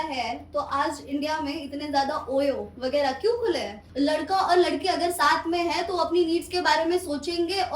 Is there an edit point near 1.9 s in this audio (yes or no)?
no